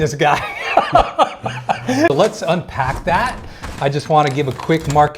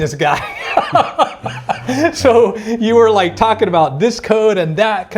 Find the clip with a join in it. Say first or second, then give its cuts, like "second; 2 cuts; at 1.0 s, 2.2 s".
first; 1 cut; at 2.1 s